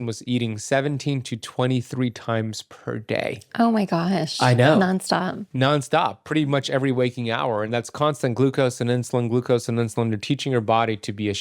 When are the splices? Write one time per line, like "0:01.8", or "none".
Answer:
none